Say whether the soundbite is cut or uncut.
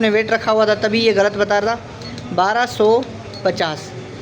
uncut